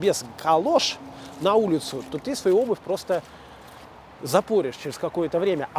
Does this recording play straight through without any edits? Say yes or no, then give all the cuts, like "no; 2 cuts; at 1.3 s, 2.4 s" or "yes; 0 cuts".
yes; 0 cuts